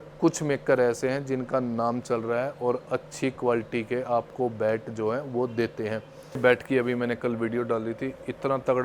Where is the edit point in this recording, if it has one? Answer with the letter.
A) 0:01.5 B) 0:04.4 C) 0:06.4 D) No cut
C